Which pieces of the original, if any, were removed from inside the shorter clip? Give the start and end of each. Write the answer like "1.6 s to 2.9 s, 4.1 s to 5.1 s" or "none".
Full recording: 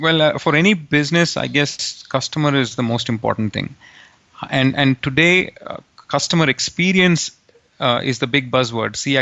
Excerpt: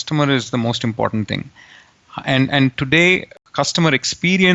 5.6 s to 5.9 s

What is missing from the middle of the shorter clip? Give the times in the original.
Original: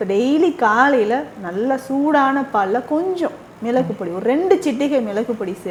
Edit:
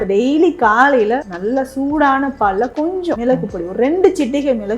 1.3 s to 1.5 s, 3.3 s to 3.7 s

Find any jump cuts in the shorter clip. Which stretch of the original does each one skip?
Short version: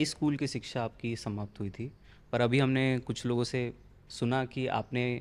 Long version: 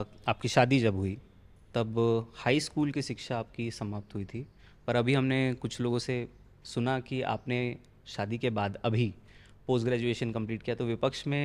none

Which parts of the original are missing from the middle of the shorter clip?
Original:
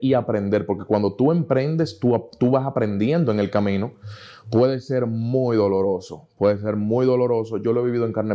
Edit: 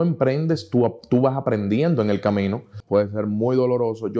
4.0 s to 6.2 s

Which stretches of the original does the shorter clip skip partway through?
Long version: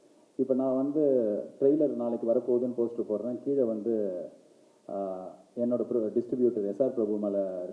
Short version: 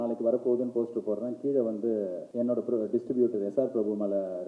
4.3 s to 5.5 s

